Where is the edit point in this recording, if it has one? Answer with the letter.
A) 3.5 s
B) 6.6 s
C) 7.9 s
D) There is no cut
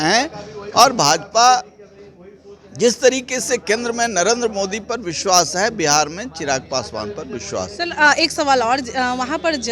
D